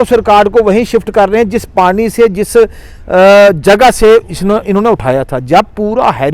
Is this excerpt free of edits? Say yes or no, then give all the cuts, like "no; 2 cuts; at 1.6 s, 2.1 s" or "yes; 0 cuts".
yes; 0 cuts